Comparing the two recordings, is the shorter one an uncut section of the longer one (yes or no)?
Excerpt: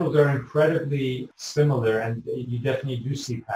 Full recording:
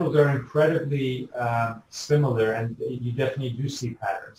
no